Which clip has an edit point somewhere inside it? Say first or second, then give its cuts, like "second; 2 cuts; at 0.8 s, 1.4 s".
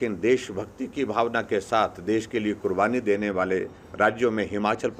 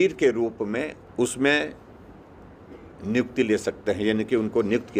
second; 1 cut; at 1.0 s